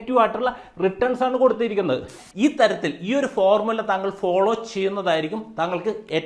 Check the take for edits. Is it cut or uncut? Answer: cut